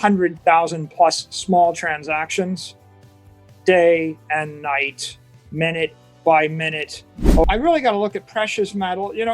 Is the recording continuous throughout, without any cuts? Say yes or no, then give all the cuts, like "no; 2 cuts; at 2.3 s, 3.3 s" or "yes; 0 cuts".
no; 1 cut; at 7.4 s